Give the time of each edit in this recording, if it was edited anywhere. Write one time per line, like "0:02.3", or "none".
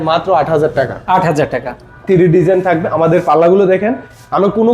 none